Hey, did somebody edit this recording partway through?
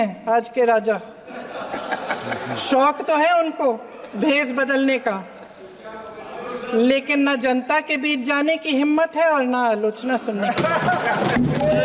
no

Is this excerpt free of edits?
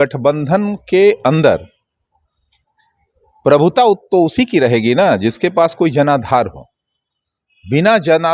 yes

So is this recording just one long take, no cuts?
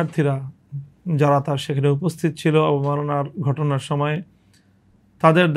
yes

